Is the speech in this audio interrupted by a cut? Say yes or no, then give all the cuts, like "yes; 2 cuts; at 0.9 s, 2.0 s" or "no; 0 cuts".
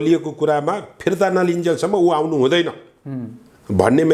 no; 0 cuts